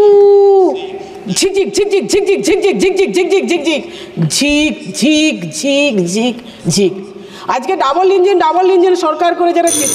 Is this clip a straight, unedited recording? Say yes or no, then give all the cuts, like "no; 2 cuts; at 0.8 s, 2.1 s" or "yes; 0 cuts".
yes; 0 cuts